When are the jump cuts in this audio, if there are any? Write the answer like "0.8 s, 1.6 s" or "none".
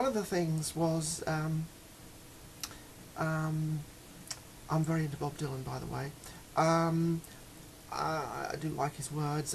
7.8 s

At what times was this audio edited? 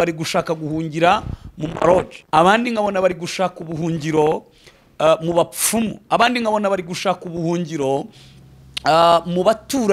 2.2 s

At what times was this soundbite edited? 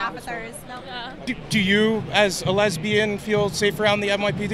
1.2 s

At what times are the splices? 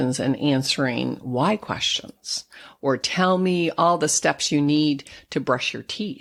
none

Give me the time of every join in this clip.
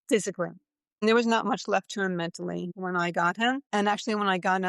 1.0 s, 2.7 s, 3.6 s

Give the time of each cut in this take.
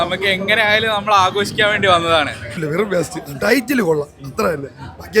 2.6 s

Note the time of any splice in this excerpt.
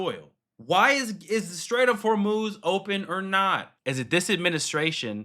3.7 s

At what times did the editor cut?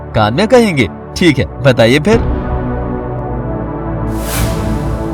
2.2 s

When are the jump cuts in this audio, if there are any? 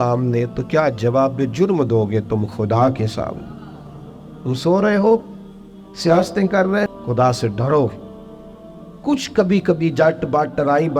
6.9 s

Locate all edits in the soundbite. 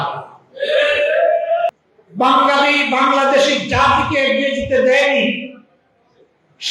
1.7 s

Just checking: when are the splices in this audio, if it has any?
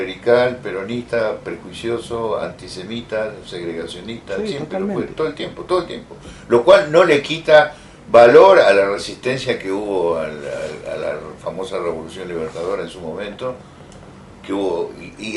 none

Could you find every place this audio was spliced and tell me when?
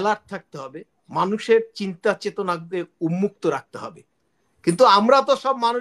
none

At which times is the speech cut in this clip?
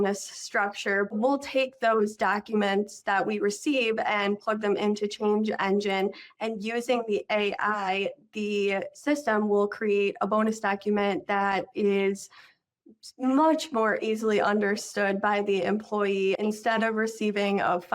1.1 s, 16.4 s

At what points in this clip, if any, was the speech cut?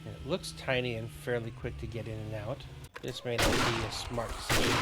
2.8 s

